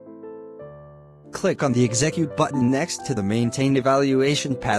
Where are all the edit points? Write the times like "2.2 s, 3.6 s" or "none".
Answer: 1.3 s